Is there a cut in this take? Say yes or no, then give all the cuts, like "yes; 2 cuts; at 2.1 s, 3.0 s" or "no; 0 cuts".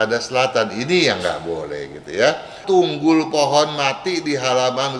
yes; 1 cut; at 2.6 s